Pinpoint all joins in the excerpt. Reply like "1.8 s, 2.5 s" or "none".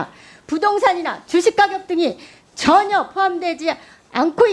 none